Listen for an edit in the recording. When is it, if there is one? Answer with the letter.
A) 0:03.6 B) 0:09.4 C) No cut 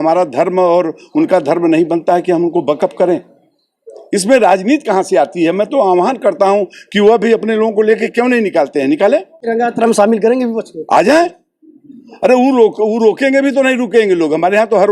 B